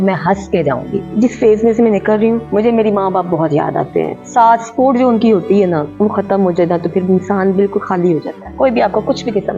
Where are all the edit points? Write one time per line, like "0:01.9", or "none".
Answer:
0:01.1
0:02.4
0:04.2
0:05.9
0:08.4